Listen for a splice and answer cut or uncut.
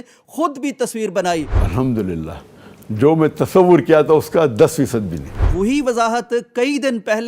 cut